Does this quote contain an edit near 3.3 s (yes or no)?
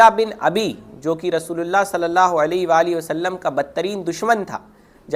no